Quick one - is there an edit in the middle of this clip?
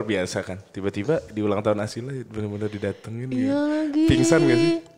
no; 0 cuts

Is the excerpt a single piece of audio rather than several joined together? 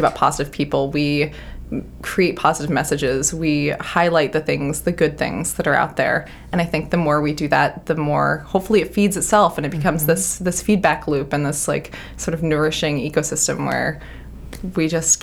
yes; 0 cuts

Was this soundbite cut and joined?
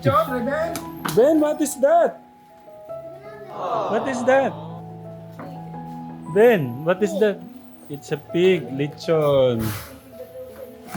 yes; 2 cuts; at 2.2 s, 3.9 s

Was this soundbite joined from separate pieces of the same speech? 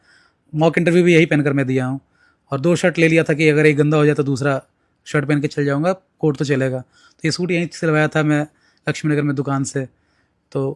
no; 0 cuts

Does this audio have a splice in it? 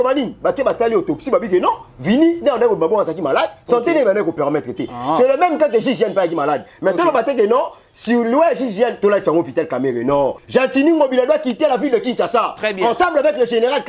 yes; 1 cut; at 10.4 s

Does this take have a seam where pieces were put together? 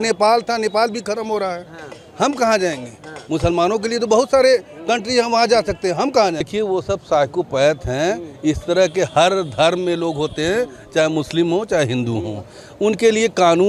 no; 0 cuts

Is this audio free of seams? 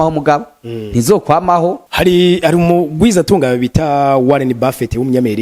no; 1 cut; at 1.8 s

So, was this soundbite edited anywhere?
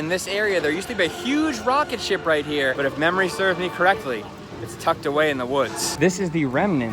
yes; 2 cuts; at 2.8 s, 5.8 s

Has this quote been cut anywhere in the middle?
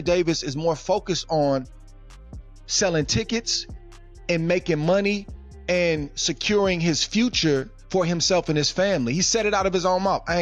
no; 0 cuts

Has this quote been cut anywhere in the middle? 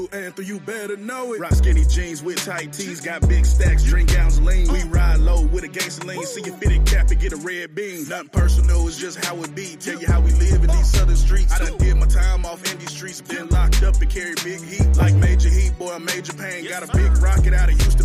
yes; 1 cut; at 1.4 s

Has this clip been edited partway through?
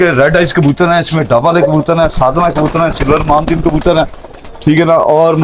no; 0 cuts

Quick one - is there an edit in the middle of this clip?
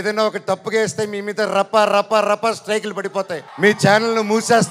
yes; 1 cut; at 3.4 s

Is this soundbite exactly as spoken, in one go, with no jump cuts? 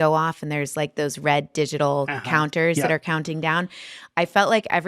yes; 0 cuts

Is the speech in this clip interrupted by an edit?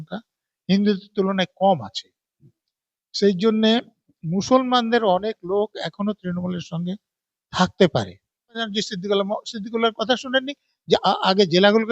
yes; 1 cut; at 8.7 s

